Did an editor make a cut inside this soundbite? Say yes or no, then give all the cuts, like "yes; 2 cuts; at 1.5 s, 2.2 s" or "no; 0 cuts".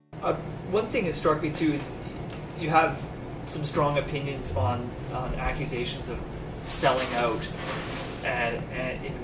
no; 0 cuts